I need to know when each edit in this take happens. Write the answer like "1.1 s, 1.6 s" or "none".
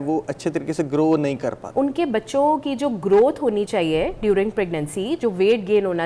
1.6 s

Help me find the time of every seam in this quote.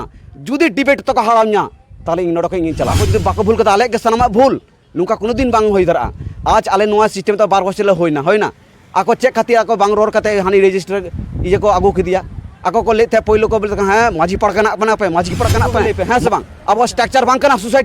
3.0 s, 15.9 s

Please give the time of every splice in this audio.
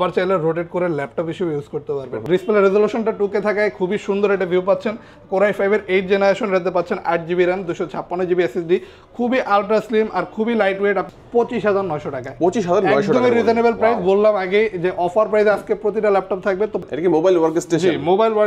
2.1 s, 11.2 s, 16.9 s

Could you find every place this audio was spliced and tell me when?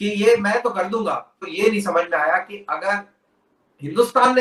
none

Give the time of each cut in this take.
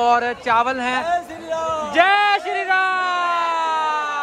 none

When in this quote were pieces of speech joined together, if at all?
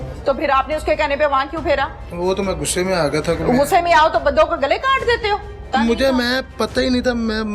5.7 s

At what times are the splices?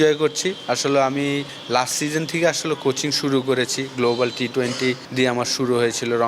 1.5 s, 5.0 s

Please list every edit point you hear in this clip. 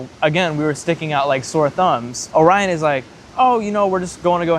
2.2 s

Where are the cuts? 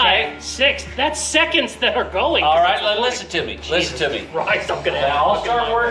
none

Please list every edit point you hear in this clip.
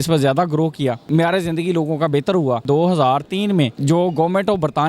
1.0 s, 2.6 s, 3.8 s

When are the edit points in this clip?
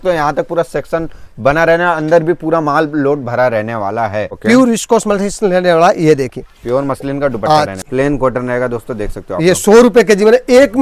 4.3 s, 7.7 s

